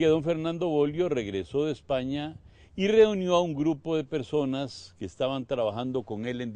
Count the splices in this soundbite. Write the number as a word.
one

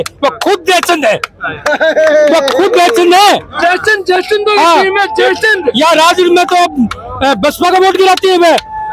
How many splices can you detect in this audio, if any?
zero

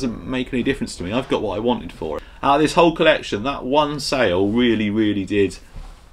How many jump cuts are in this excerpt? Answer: one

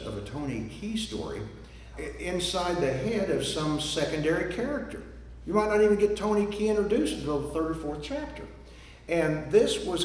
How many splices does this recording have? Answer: one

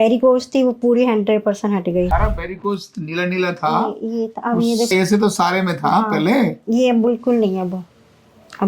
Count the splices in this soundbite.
two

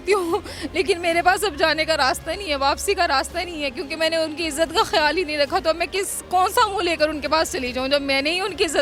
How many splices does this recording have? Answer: zero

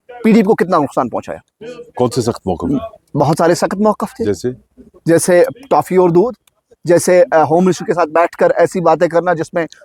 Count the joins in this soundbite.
zero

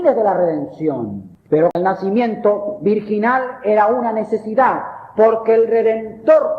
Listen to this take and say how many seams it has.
one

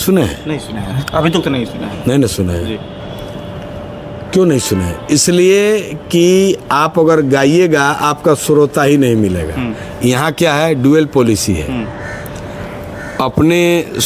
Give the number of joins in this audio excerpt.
zero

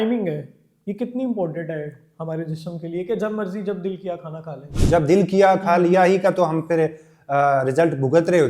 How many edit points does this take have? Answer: one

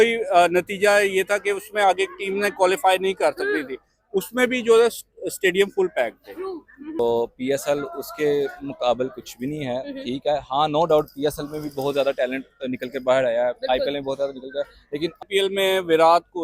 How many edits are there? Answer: two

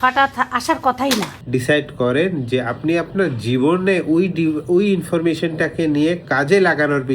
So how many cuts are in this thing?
one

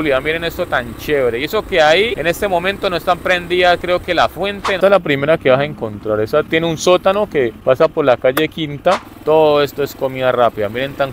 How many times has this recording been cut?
five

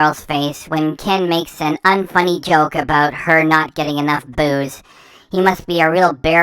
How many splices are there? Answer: zero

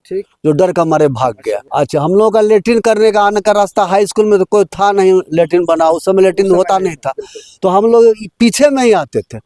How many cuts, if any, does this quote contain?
one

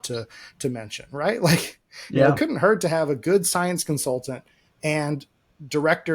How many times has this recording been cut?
zero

